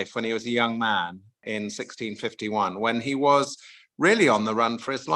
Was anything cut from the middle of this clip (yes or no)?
yes